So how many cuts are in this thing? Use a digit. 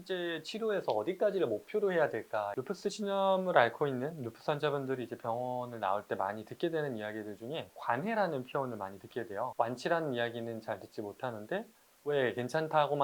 2